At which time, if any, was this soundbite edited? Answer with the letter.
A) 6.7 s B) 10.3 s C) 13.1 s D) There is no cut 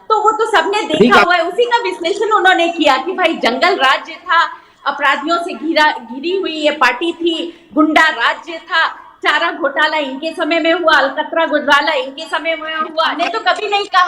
C